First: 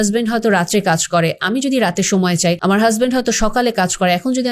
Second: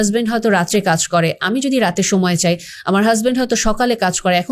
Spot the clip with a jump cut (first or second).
first